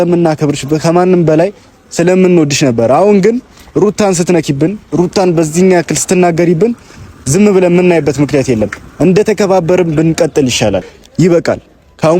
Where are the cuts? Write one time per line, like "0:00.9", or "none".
0:11.0